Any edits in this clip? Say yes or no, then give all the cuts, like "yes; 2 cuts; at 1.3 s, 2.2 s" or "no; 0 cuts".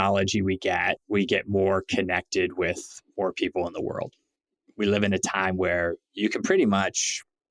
yes; 1 cut; at 1.0 s